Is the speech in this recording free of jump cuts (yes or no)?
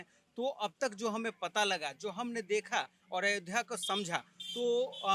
yes